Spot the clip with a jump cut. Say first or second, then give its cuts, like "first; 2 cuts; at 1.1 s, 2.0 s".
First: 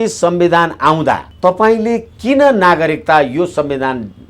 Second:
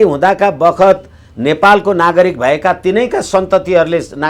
first; 1 cut; at 1.3 s